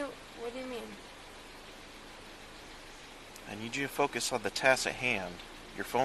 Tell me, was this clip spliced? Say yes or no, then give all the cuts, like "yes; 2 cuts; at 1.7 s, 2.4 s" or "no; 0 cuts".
yes; 1 cut; at 2.8 s